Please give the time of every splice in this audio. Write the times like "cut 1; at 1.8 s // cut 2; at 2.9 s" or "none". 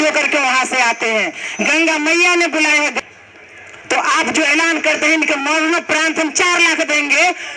cut 1; at 3.0 s